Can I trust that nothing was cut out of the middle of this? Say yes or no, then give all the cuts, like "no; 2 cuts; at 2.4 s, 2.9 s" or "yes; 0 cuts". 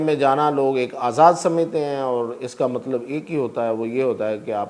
yes; 0 cuts